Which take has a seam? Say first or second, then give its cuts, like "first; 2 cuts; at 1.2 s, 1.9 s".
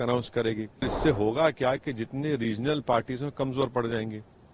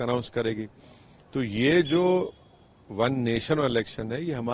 first; 1 cut; at 0.9 s